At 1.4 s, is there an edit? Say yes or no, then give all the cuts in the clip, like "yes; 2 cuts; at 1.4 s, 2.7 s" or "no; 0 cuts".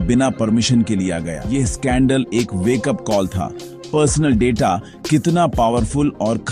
yes; 1 cut; at 1.4 s